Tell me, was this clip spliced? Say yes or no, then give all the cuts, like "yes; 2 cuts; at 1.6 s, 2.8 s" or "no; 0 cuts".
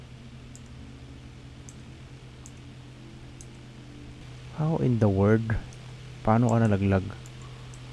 yes; 1 cut; at 4.2 s